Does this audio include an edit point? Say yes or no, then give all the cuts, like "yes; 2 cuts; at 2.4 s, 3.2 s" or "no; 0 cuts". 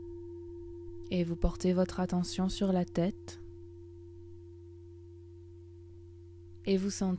yes; 1 cut; at 1.1 s